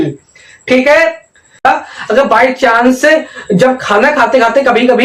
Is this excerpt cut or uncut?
cut